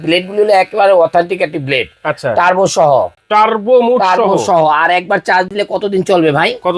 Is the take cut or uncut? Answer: uncut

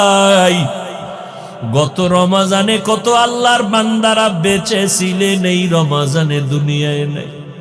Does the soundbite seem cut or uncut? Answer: uncut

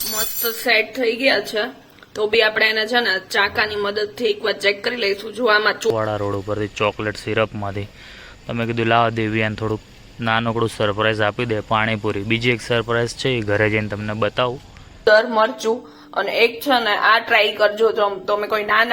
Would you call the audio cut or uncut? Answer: cut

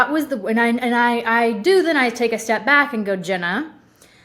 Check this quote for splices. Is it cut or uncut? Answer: uncut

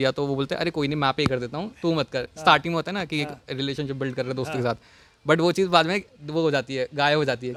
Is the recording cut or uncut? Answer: uncut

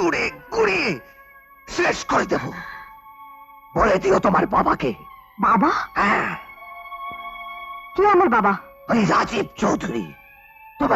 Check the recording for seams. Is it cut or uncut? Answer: uncut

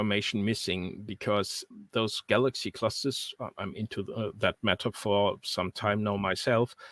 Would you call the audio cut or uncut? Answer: cut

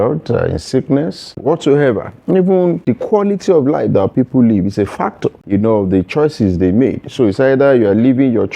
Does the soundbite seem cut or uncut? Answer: cut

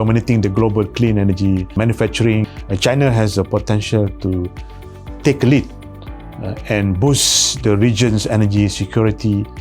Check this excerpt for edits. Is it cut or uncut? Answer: cut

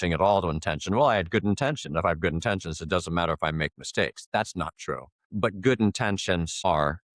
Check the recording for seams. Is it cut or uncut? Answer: uncut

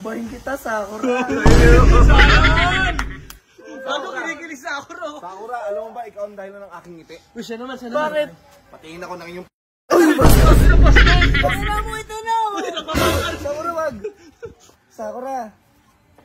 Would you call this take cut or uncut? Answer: uncut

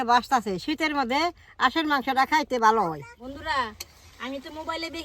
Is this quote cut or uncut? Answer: cut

